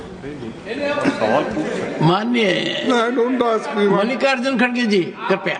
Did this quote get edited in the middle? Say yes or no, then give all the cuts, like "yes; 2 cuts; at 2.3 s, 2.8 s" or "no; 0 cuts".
no; 0 cuts